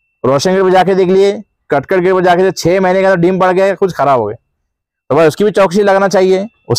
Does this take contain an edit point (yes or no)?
no